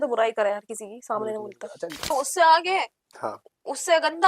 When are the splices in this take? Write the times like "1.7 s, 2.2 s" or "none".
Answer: 2.1 s